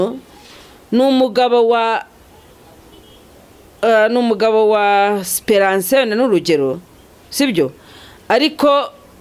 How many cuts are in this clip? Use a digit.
0